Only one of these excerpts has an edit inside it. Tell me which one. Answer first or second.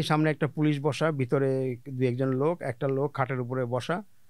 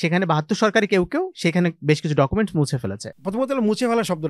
second